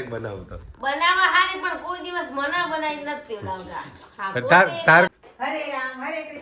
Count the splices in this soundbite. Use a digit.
1